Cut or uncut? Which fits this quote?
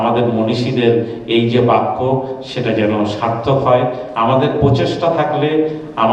uncut